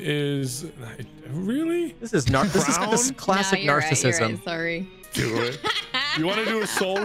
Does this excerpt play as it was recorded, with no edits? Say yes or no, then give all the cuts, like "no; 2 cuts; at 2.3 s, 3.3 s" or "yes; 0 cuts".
no; 1 cut; at 5.0 s